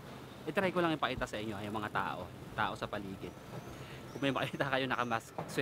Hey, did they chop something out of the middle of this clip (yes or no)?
no